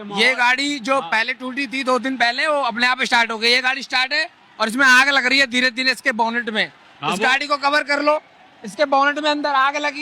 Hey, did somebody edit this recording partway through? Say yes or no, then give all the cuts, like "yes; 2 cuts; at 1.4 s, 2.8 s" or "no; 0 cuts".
no; 0 cuts